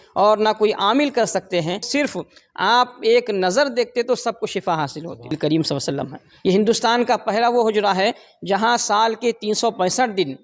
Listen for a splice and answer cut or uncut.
cut